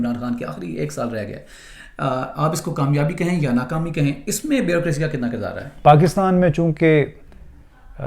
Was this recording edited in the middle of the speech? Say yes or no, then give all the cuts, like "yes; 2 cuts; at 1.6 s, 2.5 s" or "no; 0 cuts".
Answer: yes; 1 cut; at 5.6 s